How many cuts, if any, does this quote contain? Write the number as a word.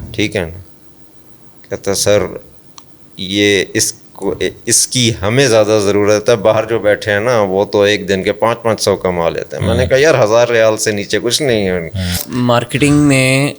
one